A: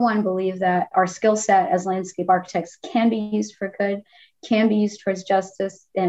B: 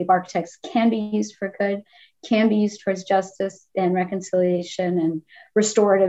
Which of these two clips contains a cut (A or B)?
A